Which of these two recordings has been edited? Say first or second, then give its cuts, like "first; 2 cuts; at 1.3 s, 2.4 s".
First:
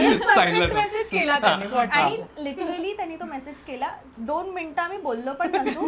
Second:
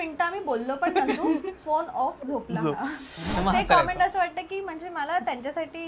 second; 1 cut; at 3.1 s